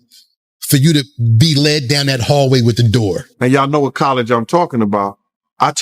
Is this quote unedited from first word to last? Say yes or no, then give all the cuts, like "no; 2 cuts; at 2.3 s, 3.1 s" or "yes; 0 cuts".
no; 1 cut; at 3.3 s